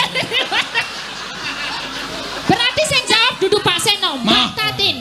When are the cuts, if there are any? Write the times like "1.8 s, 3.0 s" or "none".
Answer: 3.0 s